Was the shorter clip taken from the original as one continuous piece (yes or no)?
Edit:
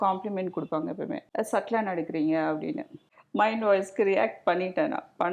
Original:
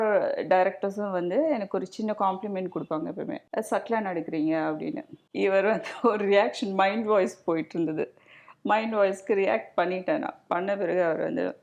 no